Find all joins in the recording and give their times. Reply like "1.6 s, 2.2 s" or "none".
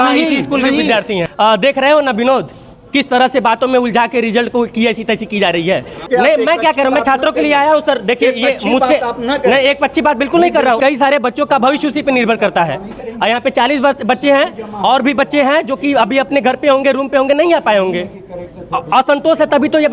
1.2 s, 6.0 s, 10.8 s